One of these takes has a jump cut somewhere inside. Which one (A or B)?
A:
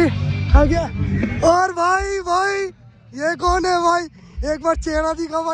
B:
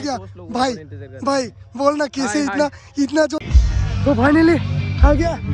B